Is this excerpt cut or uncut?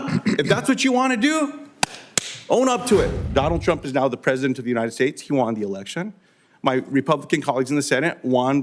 cut